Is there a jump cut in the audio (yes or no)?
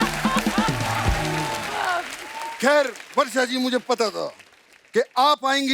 no